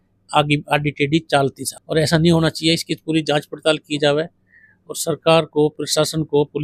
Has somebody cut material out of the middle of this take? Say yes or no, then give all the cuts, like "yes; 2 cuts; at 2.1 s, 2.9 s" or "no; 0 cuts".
no; 0 cuts